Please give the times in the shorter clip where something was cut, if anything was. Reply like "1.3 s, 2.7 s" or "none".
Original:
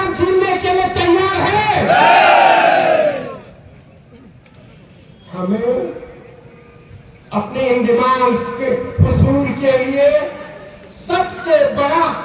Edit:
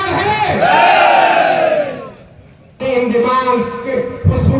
2.8 s